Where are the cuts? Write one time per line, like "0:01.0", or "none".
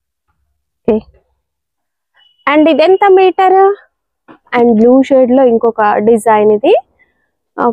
0:04.5